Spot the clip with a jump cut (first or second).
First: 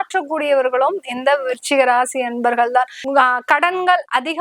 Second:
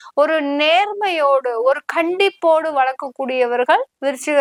first